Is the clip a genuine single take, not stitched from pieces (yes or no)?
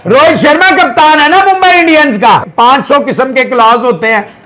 no